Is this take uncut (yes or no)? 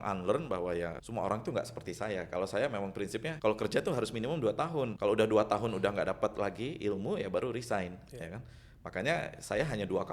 no